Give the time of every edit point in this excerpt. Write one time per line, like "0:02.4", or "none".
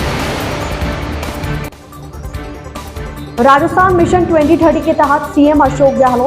0:02.2